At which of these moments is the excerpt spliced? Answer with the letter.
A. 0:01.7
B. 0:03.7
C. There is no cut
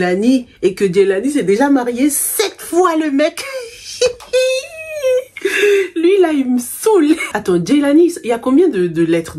C